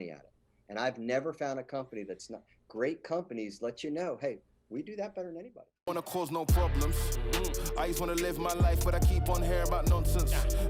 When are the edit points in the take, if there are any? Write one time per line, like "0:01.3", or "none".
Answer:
0:05.6